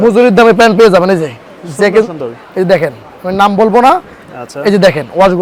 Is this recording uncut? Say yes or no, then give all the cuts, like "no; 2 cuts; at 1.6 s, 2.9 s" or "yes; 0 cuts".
yes; 0 cuts